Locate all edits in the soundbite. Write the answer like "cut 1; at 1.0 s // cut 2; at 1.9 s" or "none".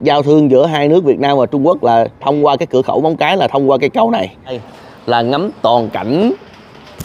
cut 1; at 4.6 s